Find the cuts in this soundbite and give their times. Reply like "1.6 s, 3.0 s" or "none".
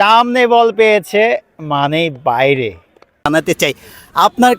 3.3 s